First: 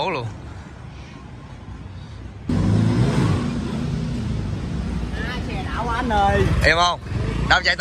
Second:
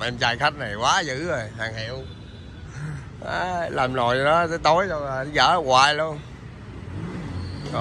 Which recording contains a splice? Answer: first; 1 cut; at 2.5 s

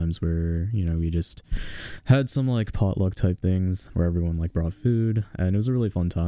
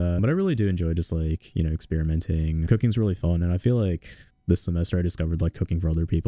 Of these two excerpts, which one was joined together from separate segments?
second; 1 cut; at 2.6 s

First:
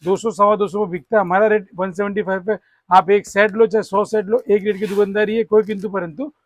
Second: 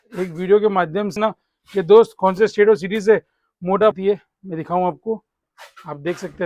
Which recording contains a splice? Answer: second; 2 cuts; at 1.2 s, 3.9 s

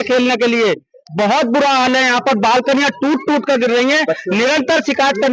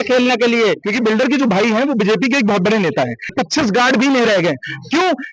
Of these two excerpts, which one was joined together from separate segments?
second; 2 cuts; at 0.8 s, 3.3 s

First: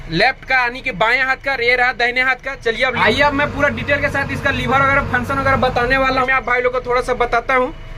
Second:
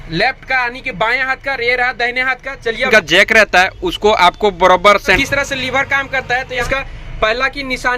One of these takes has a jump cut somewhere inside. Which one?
second; 3 cuts; at 2.9 s, 5.2 s, 6.6 s

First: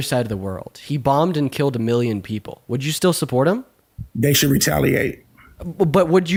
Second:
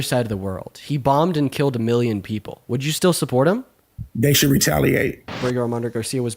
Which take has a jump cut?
second; 1 cut; at 5.4 s

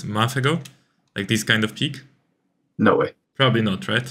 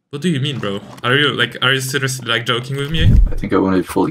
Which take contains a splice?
second; 1 cut; at 3.1 s

